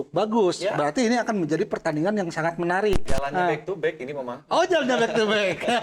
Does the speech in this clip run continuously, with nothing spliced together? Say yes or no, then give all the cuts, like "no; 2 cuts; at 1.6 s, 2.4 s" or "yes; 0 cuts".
no; 1 cut; at 3.1 s